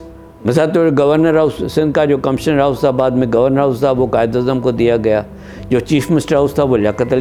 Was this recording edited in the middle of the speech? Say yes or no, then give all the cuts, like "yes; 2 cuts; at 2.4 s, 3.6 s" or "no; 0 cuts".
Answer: no; 0 cuts